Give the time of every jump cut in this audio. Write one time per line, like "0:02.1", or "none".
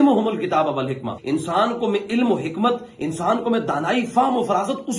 0:01.2